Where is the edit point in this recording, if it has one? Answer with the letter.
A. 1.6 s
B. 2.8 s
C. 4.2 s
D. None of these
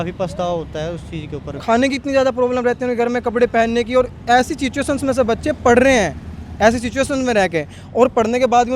A